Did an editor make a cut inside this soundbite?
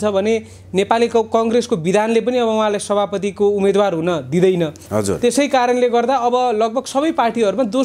no; 0 cuts

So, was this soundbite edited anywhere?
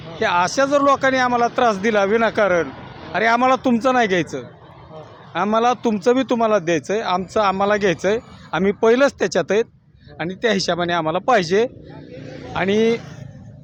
no; 0 cuts

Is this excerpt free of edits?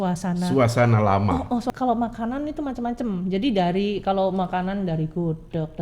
no; 1 cut; at 1.7 s

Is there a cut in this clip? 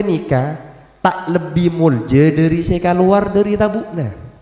no; 0 cuts

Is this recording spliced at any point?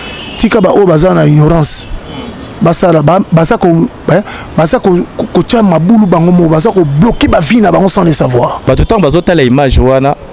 yes; 1 cut; at 8.7 s

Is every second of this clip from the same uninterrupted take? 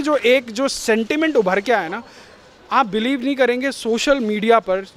yes; 0 cuts

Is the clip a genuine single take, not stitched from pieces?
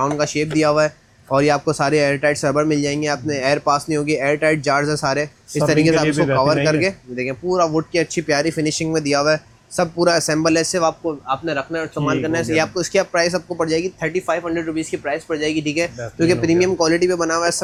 yes; 0 cuts

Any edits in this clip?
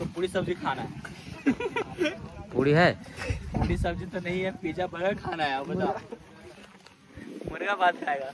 no; 0 cuts

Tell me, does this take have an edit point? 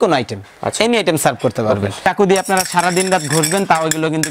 yes; 1 cut; at 2.0 s

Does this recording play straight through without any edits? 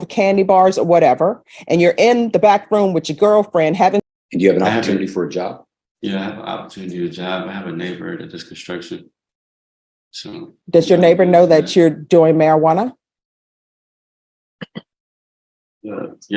no; 1 cut; at 4.0 s

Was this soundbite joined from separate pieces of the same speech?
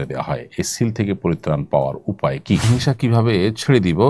yes; 1 cut; at 2.7 s

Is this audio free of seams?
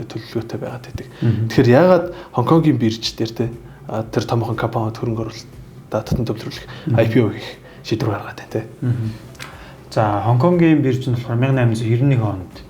yes; 0 cuts

